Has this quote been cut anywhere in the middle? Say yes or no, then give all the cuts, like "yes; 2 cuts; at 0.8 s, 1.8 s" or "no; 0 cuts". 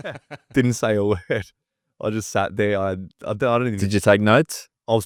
no; 0 cuts